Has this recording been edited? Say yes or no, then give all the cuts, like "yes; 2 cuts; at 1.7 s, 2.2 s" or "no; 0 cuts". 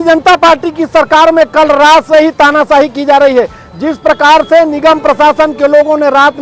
no; 0 cuts